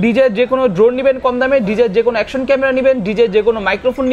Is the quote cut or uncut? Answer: uncut